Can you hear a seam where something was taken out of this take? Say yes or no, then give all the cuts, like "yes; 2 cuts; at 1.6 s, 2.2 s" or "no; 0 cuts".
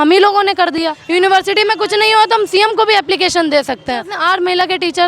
yes; 2 cuts; at 1.0 s, 4.1 s